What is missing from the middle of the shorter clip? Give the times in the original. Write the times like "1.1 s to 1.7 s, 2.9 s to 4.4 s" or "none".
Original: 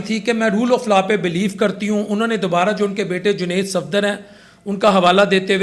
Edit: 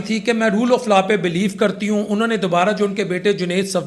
none